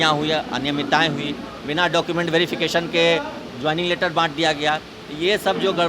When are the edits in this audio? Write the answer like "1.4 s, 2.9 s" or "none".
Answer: none